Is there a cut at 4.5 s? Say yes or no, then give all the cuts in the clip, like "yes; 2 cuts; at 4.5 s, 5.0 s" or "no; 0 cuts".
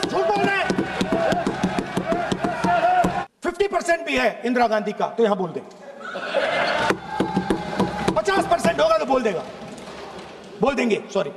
no; 1 cut; at 3.2 s